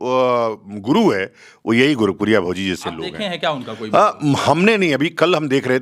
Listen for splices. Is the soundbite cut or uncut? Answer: uncut